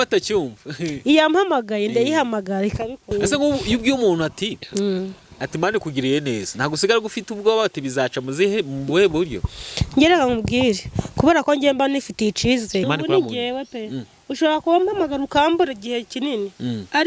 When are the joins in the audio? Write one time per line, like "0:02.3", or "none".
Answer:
0:03.1
0:12.8